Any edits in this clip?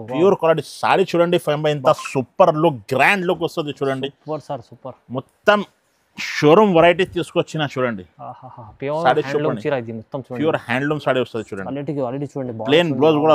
no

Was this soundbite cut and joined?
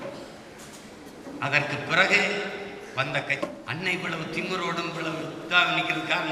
yes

